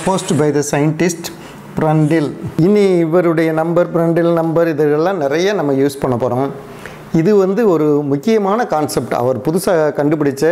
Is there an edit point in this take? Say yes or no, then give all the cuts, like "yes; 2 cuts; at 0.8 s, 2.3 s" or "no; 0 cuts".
yes; 1 cut; at 2.6 s